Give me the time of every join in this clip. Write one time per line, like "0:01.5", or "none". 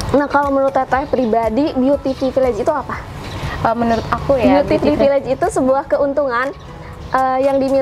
0:04.4